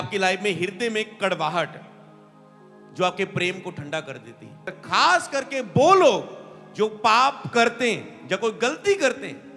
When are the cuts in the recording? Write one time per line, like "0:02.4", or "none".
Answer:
0:04.7